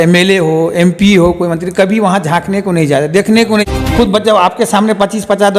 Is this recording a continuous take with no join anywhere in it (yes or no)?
no